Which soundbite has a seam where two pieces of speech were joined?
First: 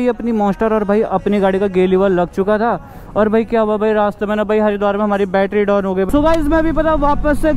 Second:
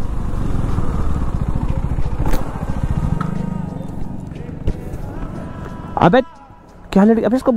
first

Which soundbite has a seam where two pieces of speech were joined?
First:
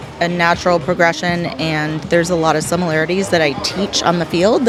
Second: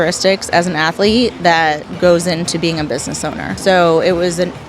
second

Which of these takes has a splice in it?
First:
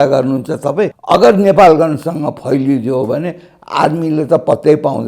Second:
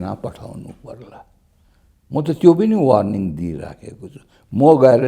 first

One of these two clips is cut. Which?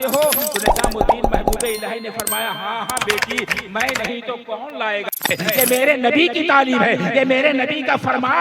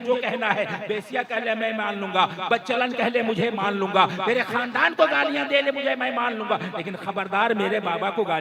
first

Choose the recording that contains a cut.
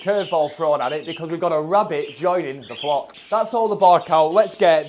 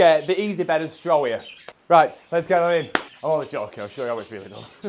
first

